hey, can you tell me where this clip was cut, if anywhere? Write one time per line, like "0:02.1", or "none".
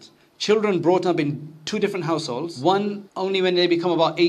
0:02.5
0:03.1